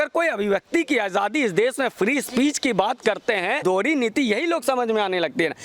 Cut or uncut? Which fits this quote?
cut